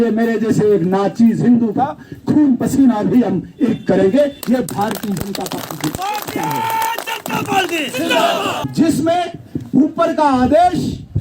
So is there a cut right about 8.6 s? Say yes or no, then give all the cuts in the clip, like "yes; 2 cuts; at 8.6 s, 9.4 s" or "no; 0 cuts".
yes; 1 cut; at 8.6 s